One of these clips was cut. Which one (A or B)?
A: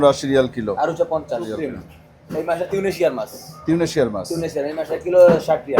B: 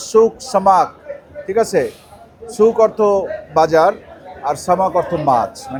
A